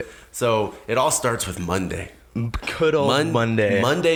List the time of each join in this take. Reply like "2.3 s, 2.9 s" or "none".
none

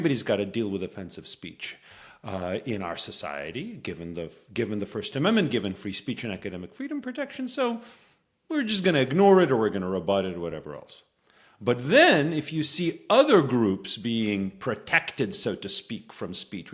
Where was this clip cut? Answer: none

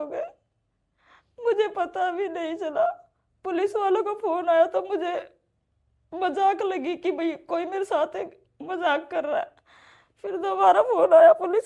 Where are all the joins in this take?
none

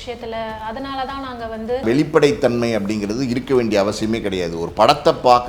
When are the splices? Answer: 1.8 s

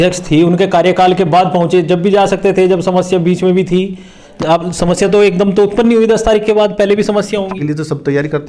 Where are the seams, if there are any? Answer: 7.6 s

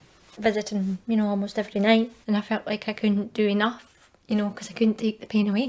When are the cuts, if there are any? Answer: 2.2 s

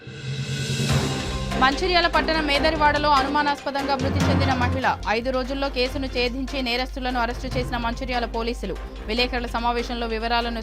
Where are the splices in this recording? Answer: none

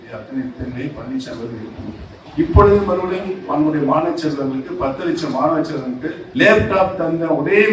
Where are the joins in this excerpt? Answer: 2.2 s, 6.2 s

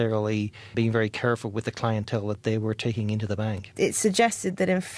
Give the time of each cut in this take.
none

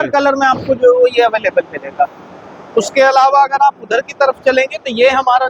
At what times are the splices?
none

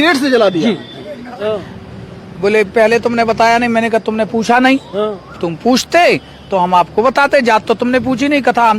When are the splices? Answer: 1.4 s

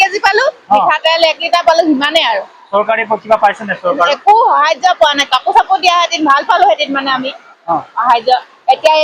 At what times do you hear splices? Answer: none

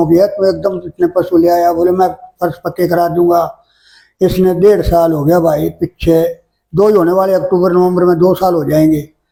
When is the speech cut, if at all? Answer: none

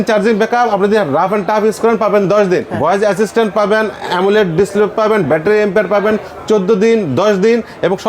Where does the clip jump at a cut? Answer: 2.7 s

